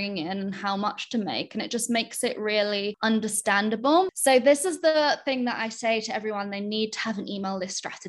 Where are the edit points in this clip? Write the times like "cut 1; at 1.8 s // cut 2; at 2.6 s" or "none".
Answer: cut 1; at 3.0 s // cut 2; at 4.1 s